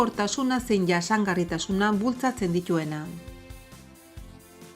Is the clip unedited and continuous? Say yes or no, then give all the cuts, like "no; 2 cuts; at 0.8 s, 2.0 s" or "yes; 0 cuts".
no; 1 cut; at 3.2 s